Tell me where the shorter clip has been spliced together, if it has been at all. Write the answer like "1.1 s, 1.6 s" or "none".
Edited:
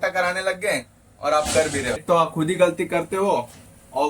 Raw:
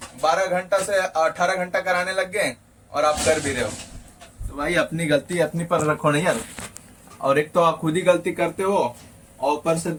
2.0 s